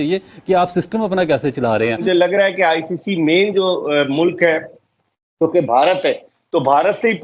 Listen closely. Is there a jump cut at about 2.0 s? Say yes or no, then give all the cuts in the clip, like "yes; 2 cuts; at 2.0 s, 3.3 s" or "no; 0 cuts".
yes; 1 cut; at 2.0 s